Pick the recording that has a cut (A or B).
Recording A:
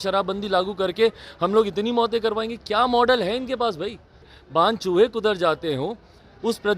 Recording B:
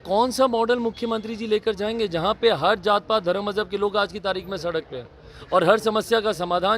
A